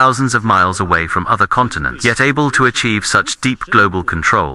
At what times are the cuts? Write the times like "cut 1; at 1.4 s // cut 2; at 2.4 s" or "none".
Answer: none